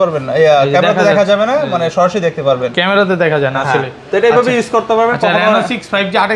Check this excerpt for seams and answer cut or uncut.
uncut